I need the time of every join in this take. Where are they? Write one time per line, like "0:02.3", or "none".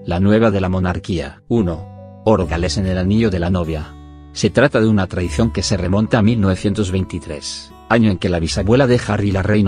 none